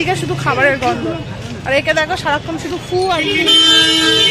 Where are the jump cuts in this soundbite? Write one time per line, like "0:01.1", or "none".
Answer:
none